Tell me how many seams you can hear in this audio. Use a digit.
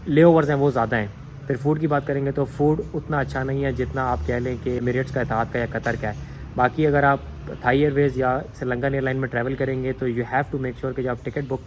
0